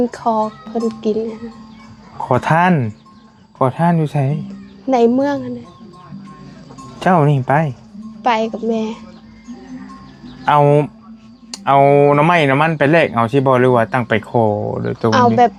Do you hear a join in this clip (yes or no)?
no